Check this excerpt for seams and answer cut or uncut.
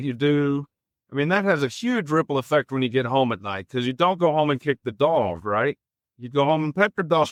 uncut